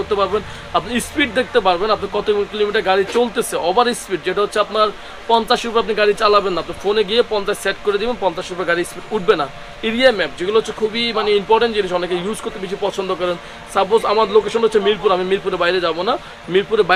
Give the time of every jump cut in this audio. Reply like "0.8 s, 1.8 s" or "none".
none